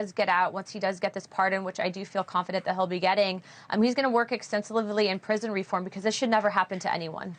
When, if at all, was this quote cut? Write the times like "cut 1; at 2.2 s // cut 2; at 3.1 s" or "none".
cut 1; at 5.9 s